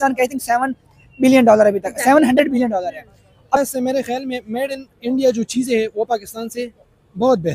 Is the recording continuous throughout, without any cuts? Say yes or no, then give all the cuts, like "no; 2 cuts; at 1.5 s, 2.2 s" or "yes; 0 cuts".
no; 1 cut; at 3.6 s